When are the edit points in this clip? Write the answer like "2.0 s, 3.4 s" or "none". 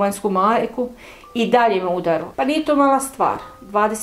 2.3 s